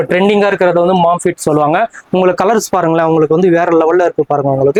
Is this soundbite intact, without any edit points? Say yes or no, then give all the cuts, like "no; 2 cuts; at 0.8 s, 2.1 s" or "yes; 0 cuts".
yes; 0 cuts